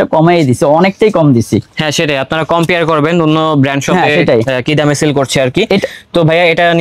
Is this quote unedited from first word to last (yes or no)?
yes